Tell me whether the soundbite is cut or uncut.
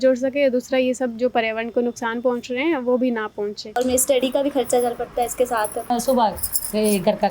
cut